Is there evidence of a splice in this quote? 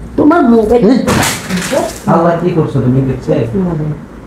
no; 0 cuts

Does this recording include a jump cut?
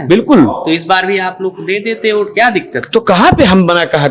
no; 0 cuts

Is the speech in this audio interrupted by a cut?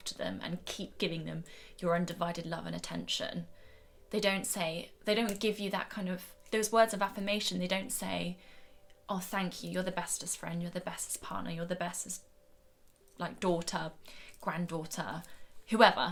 no; 0 cuts

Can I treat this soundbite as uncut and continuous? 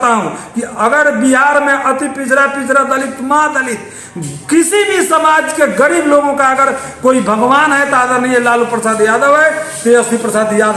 yes; 0 cuts

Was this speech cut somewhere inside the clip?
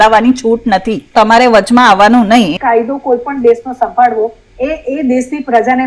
yes; 2 cuts; at 1.1 s, 2.6 s

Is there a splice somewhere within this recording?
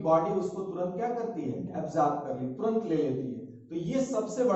no; 0 cuts

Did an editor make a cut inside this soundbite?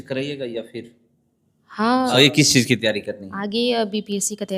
yes; 1 cut; at 2.2 s

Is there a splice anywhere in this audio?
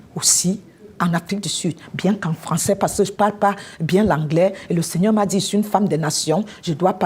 no; 0 cuts

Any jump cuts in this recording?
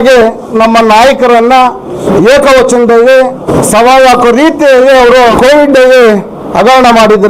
yes; 3 cuts; at 2.0 s, 3.4 s, 5.3 s

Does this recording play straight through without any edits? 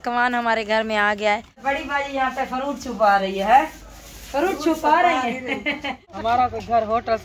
no; 2 cuts; at 1.6 s, 6.0 s

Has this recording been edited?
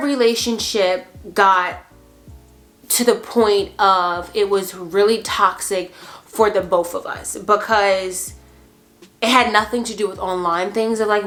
no; 0 cuts

